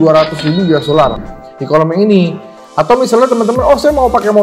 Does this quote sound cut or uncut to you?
cut